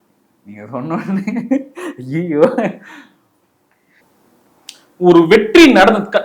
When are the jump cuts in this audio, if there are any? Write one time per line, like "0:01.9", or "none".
0:04.4